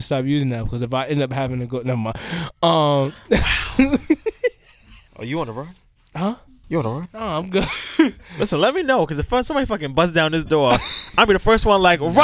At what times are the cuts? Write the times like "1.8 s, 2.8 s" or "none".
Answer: 5.1 s